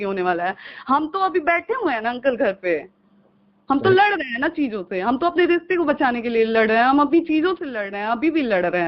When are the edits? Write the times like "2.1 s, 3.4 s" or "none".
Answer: none